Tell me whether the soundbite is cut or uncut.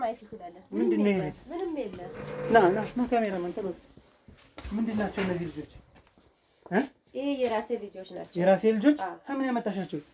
uncut